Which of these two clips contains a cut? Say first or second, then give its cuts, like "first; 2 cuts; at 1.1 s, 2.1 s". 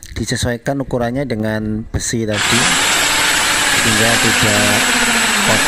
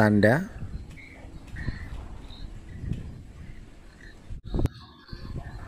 second; 1 cut; at 4.4 s